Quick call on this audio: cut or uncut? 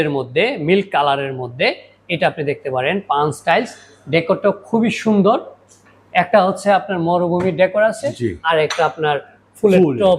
uncut